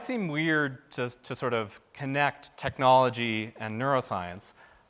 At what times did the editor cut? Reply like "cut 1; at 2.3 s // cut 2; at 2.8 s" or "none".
none